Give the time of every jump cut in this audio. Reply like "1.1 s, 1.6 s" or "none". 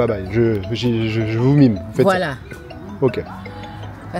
none